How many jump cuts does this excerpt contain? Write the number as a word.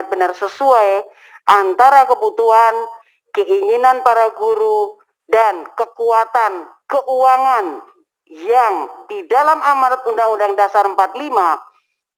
zero